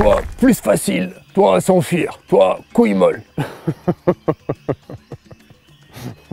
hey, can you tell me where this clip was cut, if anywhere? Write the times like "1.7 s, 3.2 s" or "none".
none